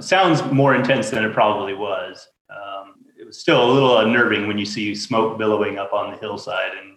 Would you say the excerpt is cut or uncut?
cut